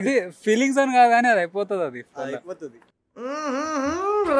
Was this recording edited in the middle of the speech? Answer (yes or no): no